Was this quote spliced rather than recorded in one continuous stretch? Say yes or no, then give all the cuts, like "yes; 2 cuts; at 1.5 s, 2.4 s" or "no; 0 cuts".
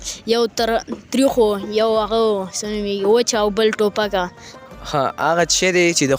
yes; 1 cut; at 4.4 s